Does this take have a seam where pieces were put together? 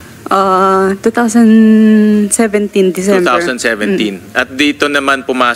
no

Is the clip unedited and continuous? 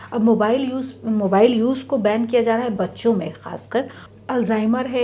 no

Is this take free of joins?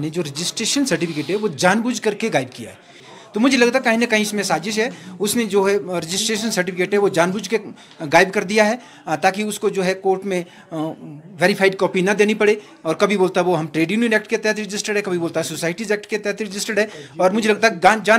no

